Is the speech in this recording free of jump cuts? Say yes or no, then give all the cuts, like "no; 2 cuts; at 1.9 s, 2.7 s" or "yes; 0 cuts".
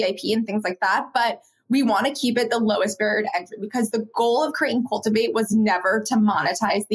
yes; 0 cuts